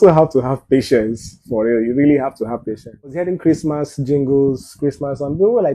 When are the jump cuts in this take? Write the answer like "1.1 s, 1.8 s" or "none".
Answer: 3.2 s